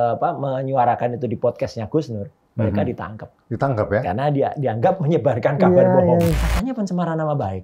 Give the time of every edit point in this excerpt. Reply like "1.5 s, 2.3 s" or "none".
6.4 s